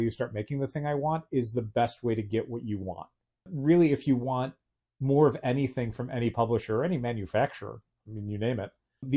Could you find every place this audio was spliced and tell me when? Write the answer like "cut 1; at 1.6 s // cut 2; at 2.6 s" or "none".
cut 1; at 3.5 s

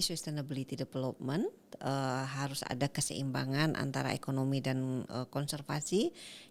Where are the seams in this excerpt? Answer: none

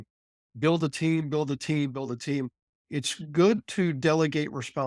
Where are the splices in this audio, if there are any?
cut 1; at 2.8 s

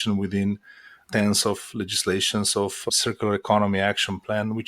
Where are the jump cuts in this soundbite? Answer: cut 1; at 2.8 s

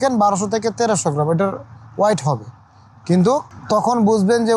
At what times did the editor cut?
cut 1; at 3.5 s

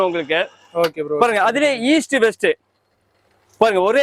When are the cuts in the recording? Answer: none

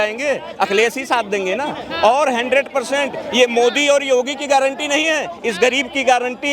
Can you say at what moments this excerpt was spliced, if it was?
none

